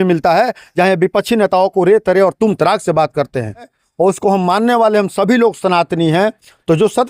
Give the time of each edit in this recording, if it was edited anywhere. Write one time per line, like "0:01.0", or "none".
0:03.7